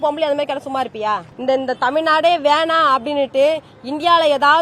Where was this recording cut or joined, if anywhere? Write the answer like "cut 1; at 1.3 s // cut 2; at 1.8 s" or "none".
cut 1; at 1.3 s